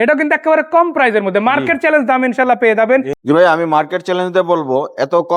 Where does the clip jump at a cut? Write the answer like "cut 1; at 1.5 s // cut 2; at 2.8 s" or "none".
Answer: cut 1; at 3.1 s